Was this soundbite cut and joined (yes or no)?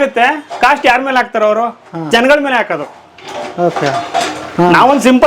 no